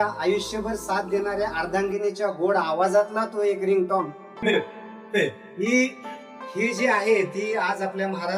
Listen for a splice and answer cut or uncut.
cut